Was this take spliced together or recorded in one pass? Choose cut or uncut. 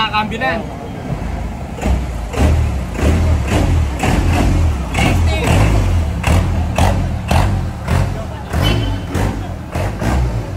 uncut